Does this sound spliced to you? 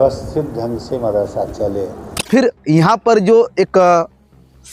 no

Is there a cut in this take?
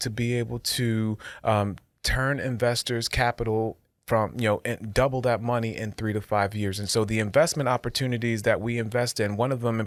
no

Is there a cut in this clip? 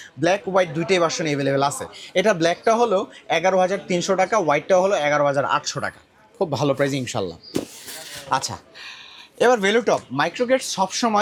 no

